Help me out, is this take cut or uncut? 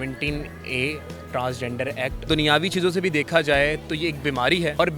cut